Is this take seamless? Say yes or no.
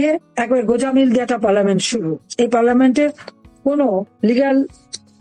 yes